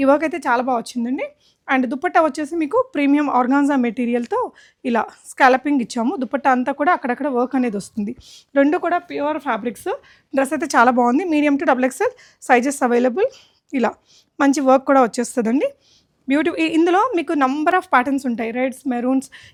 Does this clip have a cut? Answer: no; 0 cuts

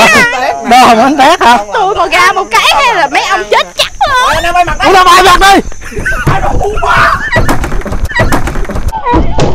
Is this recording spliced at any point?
yes; 1 cut; at 4.2 s

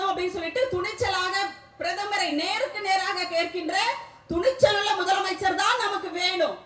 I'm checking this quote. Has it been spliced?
no; 0 cuts

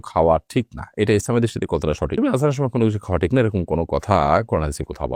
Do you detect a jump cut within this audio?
no; 0 cuts

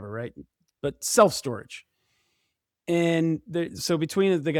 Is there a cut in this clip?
no; 0 cuts

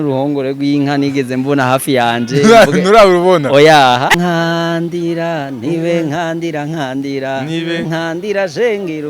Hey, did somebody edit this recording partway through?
yes; 1 cut; at 4.1 s

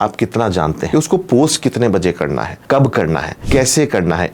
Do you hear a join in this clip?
yes; 3 cuts; at 0.9 s, 2.5 s, 3.3 s

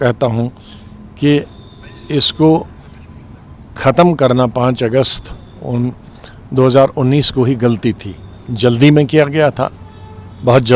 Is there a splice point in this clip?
no; 0 cuts

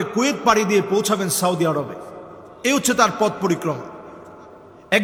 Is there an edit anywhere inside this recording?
no; 0 cuts

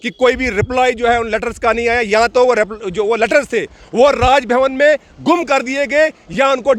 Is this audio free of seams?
yes; 0 cuts

